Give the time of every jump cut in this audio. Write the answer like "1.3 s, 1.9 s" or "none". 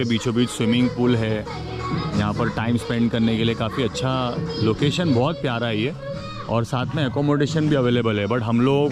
none